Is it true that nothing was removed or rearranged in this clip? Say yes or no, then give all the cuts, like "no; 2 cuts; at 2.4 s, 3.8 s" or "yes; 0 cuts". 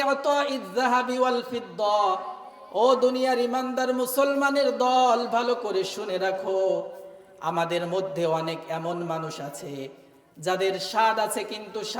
yes; 0 cuts